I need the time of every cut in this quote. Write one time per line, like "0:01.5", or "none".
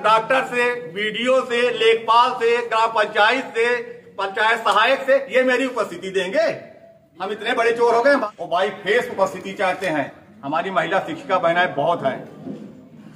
0:08.2